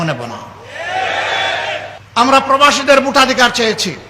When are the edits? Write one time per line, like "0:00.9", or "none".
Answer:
0:02.0

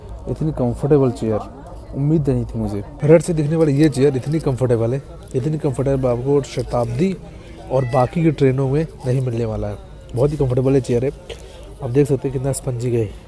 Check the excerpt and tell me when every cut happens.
none

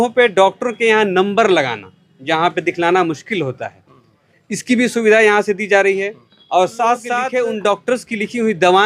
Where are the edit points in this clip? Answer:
0:07.2

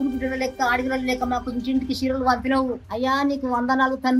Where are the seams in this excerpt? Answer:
none

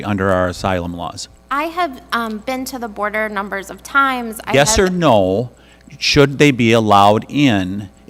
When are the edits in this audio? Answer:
none

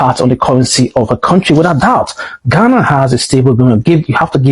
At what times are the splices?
none

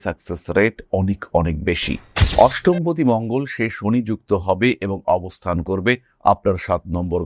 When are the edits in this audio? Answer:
0:02.1

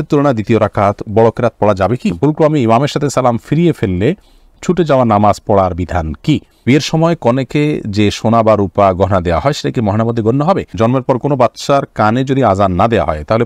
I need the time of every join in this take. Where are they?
0:02.1
0:06.6
0:10.7

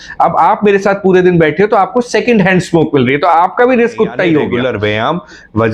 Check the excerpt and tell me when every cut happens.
0:04.5

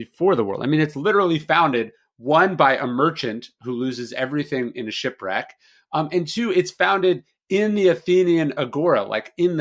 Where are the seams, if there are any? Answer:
none

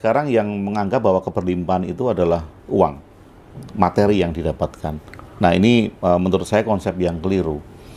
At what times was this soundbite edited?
none

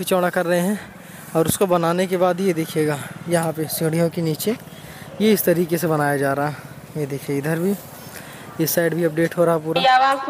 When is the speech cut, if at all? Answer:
none

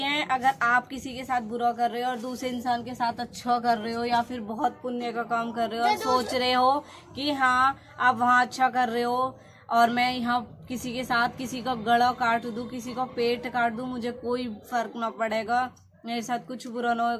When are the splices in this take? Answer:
none

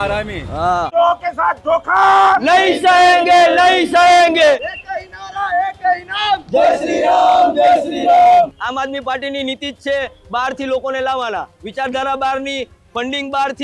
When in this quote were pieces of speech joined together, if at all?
0:00.9
0:04.6
0:08.6

